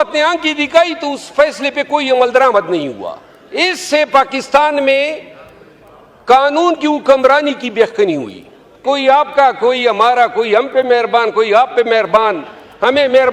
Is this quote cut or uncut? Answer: cut